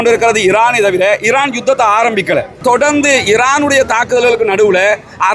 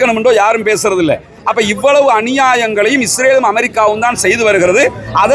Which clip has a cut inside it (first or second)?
first